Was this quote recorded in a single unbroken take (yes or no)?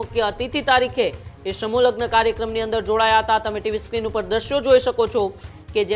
yes